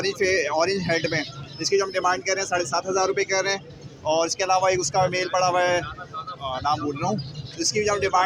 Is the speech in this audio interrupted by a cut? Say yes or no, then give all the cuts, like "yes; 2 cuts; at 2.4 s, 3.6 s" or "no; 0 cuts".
no; 0 cuts